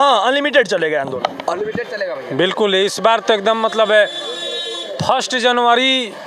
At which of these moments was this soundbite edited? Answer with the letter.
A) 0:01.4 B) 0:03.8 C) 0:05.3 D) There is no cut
D